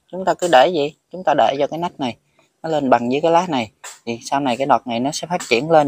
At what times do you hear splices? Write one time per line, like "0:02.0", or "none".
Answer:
none